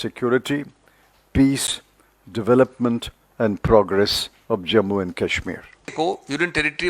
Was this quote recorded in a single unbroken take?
no; 1 cut; at 5.9 s

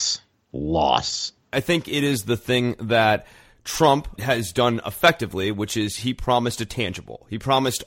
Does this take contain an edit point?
yes; 2 cuts; at 1.5 s, 4.1 s

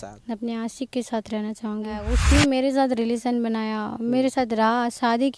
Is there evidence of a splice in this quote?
yes; 1 cut; at 2.1 s

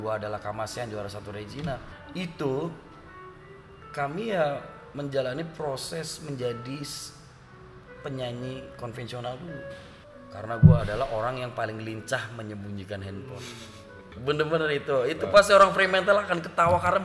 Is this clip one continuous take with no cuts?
no; 3 cuts; at 1.9 s, 9.9 s, 14.1 s

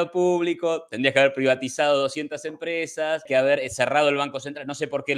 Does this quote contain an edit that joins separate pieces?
yes; 1 cut; at 3.2 s

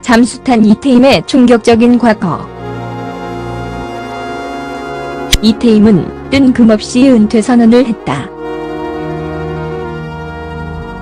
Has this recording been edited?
no; 0 cuts

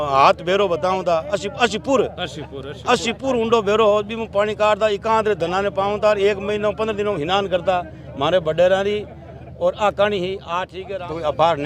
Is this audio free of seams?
no; 1 cut; at 10.7 s

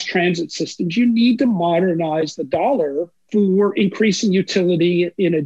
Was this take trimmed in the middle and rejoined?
yes; 1 cut; at 3.2 s

